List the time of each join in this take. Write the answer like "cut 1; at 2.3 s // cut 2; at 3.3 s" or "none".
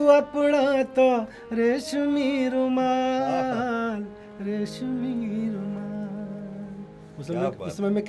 none